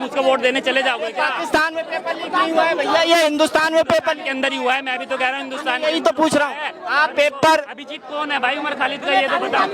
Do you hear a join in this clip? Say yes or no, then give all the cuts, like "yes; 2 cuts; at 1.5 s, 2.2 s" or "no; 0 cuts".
no; 0 cuts